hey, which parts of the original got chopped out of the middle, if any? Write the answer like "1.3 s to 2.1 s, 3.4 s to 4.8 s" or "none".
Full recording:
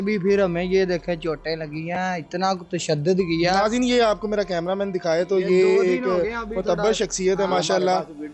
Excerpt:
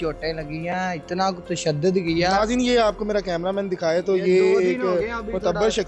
none